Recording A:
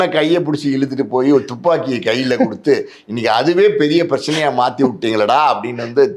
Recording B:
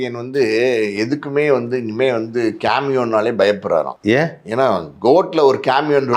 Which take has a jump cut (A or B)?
B